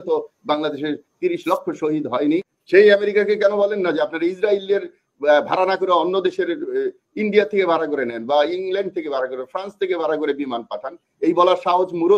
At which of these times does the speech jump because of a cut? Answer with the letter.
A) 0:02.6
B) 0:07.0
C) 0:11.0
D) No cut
A